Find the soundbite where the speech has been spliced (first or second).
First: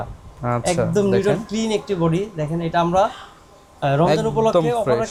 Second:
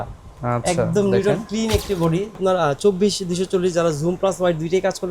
second